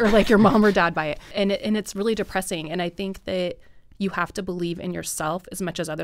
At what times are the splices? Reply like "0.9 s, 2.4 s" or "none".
1.3 s

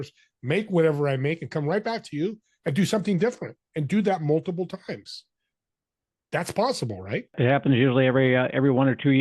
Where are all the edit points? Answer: 7.4 s

